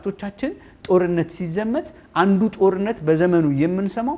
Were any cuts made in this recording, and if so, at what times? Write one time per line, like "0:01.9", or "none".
none